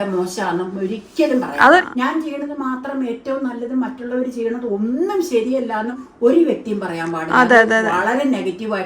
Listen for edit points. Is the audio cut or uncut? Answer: cut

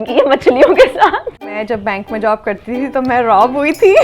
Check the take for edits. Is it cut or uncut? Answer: cut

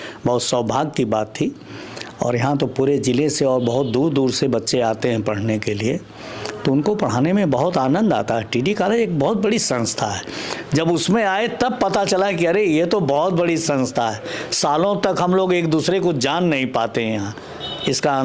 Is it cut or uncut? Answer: uncut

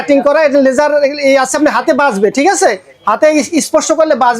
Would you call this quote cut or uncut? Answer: uncut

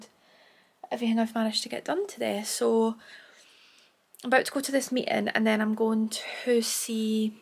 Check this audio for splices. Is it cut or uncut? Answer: uncut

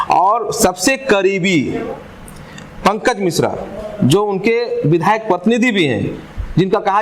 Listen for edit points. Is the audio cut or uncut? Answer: uncut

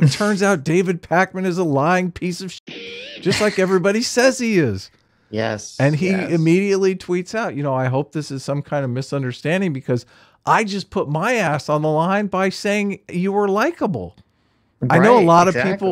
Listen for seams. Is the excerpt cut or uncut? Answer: uncut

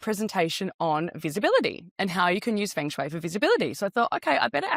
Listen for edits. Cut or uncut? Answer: uncut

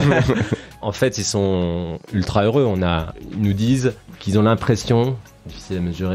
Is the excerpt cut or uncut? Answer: cut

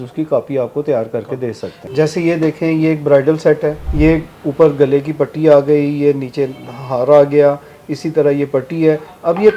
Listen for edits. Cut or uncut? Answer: cut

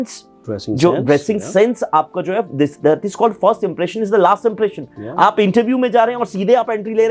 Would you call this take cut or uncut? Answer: uncut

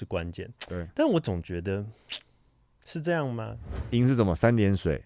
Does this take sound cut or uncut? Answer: cut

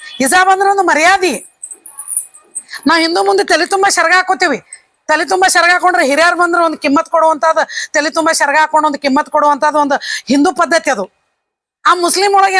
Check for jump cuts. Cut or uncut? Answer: uncut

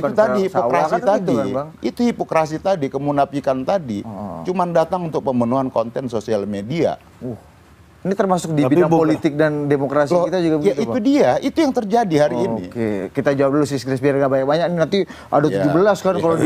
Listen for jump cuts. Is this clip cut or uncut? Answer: uncut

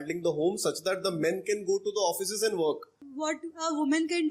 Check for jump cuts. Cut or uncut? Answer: cut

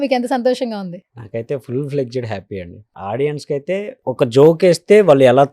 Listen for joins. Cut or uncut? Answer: cut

